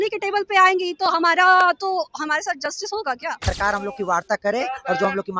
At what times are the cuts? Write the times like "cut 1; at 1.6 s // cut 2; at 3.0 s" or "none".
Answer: cut 1; at 3.5 s